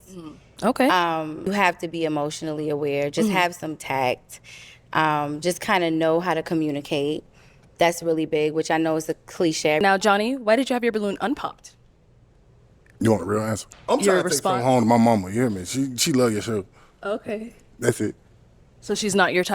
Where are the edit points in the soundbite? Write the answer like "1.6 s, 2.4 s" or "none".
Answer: 1.5 s, 9.8 s, 13.7 s